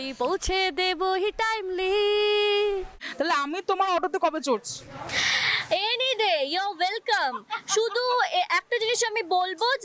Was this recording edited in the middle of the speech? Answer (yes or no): yes